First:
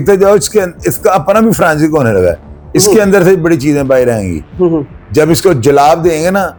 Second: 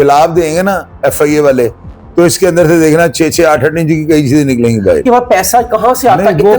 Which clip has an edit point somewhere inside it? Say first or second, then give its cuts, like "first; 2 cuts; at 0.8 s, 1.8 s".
second; 1 cut; at 5.0 s